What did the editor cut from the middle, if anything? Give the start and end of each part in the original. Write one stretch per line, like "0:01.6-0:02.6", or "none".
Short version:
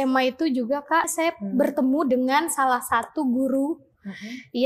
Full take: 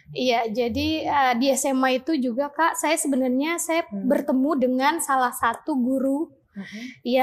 0:02.8-0:03.6

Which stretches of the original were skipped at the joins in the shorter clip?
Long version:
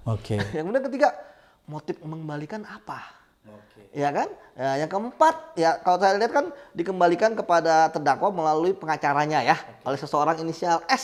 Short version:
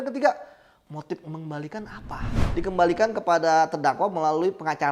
0:03.2-0:06.6

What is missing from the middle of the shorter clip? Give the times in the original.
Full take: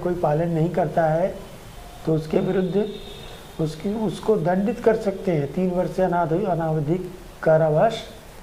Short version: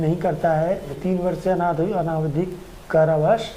0:01.5-0:05.5

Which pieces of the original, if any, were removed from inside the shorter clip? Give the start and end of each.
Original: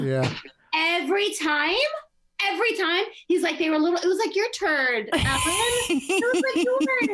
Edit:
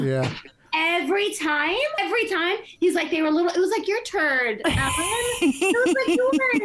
0:02.0-0:02.4

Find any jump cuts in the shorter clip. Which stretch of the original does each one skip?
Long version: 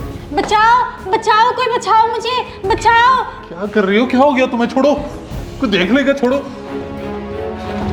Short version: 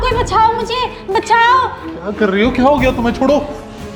none

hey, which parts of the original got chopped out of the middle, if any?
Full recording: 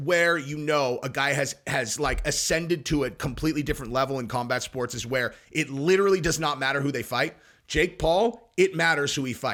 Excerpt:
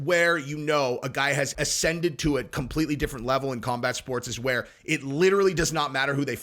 0:01.5-0:02.2

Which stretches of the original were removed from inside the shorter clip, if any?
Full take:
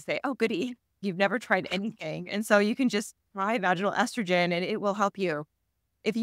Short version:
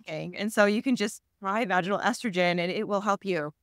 none

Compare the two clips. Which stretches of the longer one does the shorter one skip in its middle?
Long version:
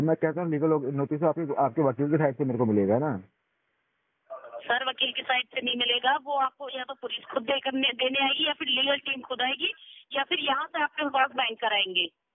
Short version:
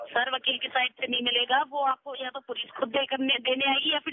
none

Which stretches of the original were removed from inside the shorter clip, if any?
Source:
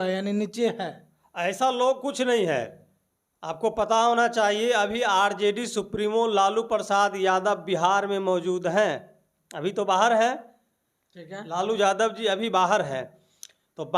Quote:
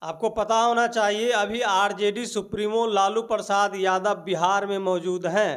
none

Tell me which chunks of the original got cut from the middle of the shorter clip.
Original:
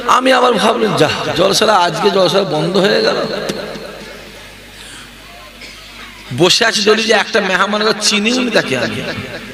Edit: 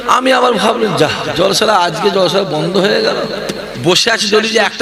0:03.7-0:06.2

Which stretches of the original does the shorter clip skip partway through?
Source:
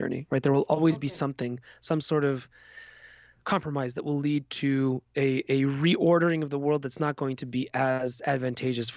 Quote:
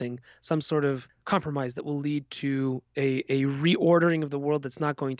0:02.5-0:03.3

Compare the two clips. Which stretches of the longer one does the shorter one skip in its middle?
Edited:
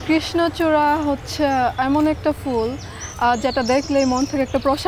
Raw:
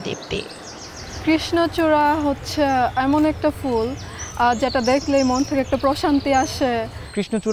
none

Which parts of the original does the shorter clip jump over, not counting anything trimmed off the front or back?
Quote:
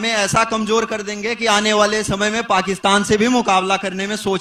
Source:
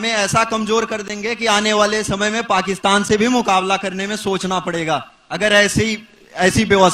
none

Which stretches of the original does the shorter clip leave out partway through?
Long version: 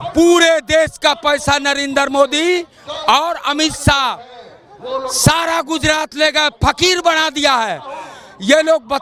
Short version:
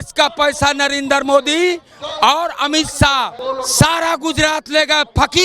0:04.2-0:04.8

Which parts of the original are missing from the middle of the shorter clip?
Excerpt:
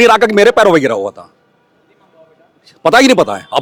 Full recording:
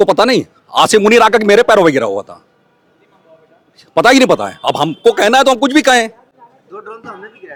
none

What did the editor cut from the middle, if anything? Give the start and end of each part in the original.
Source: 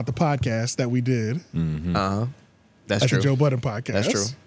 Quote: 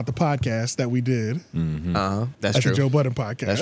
0:02.3-0:02.8

